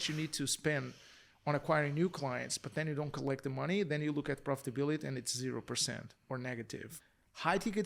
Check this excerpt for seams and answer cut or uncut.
cut